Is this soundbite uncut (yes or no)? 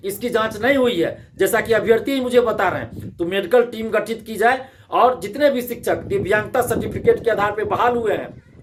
yes